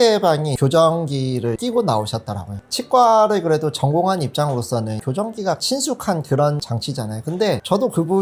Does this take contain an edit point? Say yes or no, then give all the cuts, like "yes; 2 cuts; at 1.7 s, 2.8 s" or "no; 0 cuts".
no; 0 cuts